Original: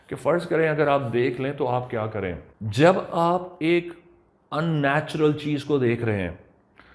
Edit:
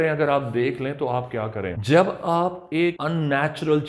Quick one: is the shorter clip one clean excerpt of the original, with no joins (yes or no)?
no